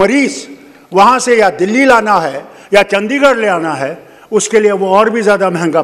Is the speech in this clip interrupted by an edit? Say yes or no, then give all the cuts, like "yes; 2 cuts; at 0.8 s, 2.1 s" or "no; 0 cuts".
no; 0 cuts